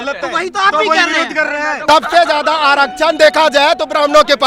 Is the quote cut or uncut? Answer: cut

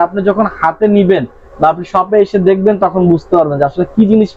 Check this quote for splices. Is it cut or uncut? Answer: uncut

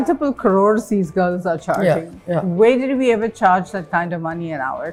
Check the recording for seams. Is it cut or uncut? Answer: uncut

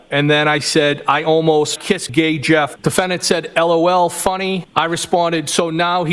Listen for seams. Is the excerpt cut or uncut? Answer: uncut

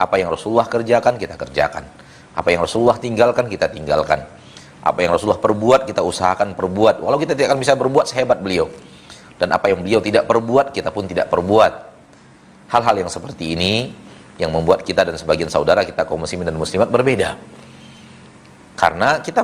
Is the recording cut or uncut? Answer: uncut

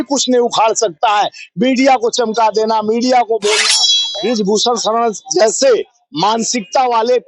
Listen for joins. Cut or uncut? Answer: cut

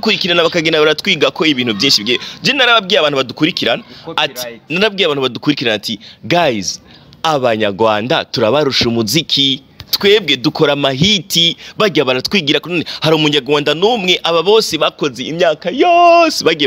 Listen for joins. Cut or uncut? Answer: uncut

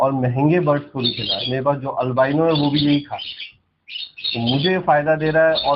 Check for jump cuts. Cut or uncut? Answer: uncut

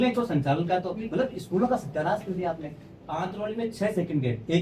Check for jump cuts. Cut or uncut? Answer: uncut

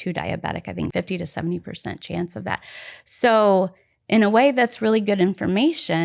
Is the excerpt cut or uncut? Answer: cut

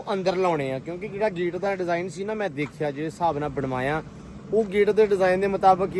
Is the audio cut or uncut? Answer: uncut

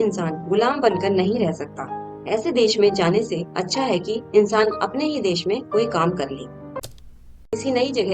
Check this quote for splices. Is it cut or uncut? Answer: cut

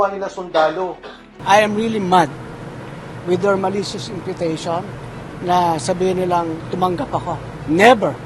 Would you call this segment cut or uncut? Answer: cut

